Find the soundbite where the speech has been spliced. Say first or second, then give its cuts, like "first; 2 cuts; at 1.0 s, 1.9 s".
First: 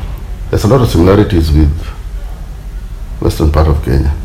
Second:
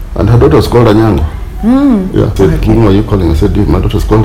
second; 1 cut; at 2.3 s